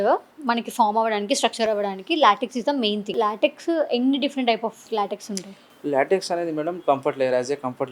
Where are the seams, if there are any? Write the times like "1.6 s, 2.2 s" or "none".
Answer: 3.1 s, 4.9 s